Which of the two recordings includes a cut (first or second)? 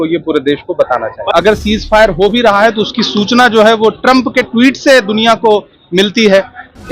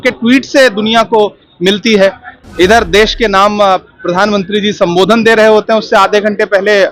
first